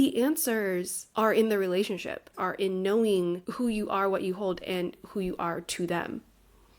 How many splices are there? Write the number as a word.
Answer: three